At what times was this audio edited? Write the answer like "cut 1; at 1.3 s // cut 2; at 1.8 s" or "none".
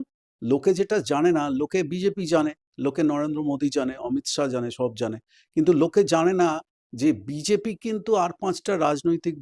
none

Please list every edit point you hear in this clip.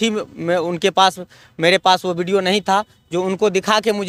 none

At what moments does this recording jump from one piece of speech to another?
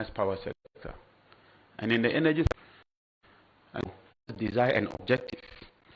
cut 1; at 4.3 s

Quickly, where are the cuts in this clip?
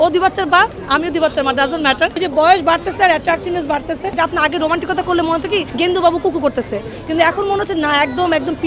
cut 1; at 2.1 s // cut 2; at 4.1 s // cut 3; at 5.7 s

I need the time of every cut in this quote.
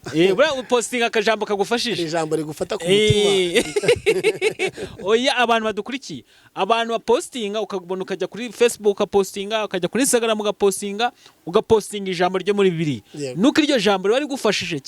none

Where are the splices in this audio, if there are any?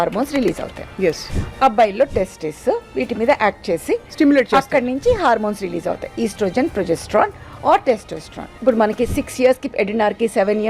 cut 1; at 1.3 s // cut 2; at 8.5 s

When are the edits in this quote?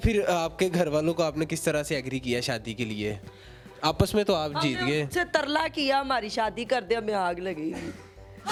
none

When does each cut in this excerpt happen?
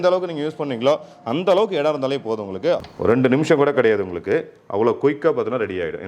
cut 1; at 2.8 s

